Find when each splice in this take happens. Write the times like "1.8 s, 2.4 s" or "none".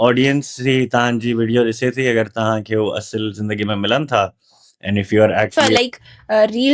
5.5 s